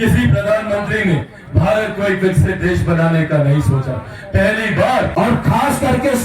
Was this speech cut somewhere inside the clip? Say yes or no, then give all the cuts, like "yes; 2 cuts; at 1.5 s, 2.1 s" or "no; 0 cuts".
yes; 1 cut; at 5.1 s